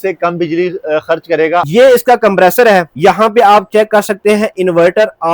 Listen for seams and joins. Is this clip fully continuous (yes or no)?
no